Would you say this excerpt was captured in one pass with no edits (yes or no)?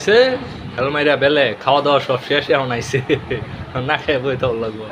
yes